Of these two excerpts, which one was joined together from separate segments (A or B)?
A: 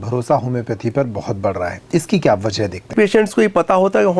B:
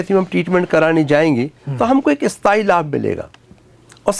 A